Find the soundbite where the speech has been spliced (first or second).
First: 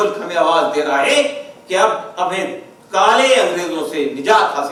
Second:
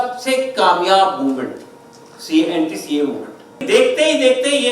second